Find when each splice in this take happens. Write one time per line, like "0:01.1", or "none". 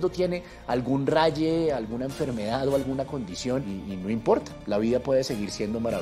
0:03.7